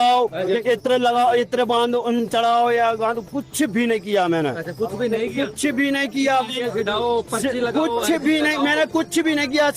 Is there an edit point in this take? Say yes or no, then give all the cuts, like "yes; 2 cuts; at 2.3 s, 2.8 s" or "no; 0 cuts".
no; 0 cuts